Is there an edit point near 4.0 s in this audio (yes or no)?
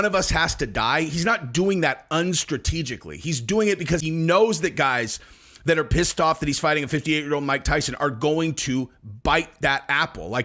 yes